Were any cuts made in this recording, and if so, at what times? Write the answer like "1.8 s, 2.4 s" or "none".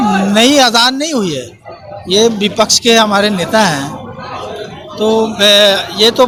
none